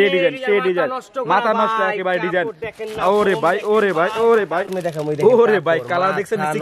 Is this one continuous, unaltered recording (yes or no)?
no